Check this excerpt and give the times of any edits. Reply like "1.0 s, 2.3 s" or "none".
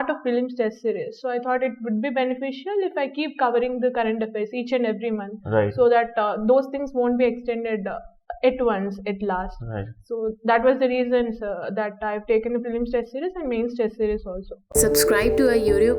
14.6 s